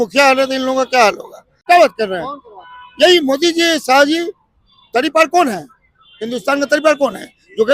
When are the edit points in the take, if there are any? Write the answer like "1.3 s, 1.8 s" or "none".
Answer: 1.5 s